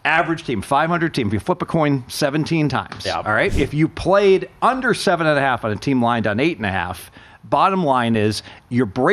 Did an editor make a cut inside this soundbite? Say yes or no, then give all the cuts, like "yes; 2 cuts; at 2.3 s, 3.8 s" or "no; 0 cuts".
yes; 1 cut; at 3.5 s